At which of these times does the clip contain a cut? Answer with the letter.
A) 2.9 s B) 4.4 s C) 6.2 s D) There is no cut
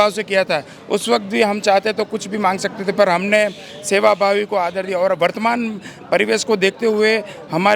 D